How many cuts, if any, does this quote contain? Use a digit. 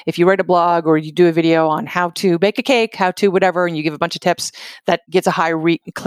1